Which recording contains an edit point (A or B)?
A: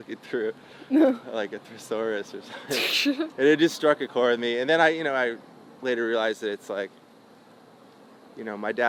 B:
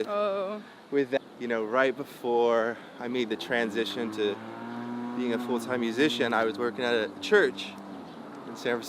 B